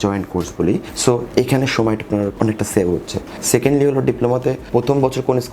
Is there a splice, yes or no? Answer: yes